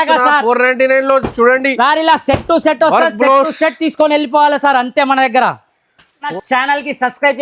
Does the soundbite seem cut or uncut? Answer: cut